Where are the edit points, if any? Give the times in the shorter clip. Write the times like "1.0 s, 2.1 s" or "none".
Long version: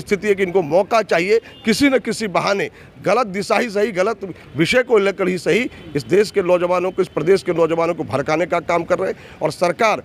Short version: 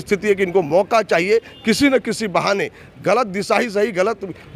none